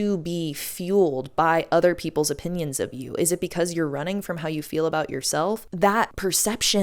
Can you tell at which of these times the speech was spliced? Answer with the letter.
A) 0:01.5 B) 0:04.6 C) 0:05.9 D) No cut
C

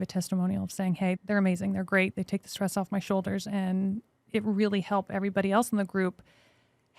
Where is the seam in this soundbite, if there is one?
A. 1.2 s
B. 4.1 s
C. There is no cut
A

